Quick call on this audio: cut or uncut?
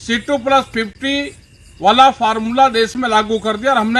uncut